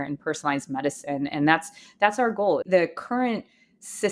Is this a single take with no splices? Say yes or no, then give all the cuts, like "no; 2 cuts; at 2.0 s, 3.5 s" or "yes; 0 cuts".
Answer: no; 1 cut; at 2.6 s